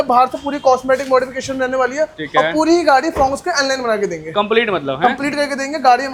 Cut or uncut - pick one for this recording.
uncut